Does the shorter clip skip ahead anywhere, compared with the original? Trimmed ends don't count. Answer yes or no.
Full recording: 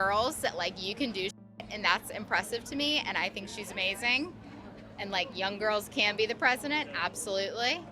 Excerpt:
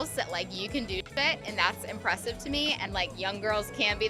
yes